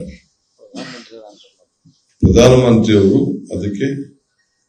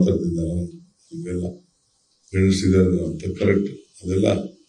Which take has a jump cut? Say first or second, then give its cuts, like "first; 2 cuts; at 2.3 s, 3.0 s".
second; 1 cut; at 1.9 s